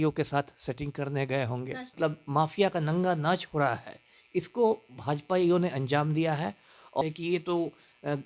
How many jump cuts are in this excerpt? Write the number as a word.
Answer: two